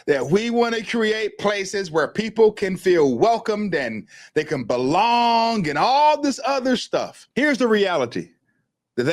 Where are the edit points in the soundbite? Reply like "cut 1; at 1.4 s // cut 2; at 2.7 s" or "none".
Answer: cut 1; at 7.2 s